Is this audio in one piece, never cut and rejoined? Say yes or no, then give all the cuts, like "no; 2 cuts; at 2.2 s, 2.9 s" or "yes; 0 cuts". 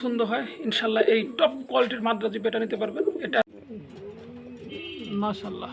no; 1 cut; at 3.4 s